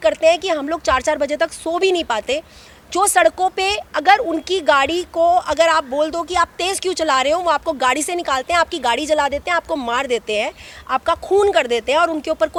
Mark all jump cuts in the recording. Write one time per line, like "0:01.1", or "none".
none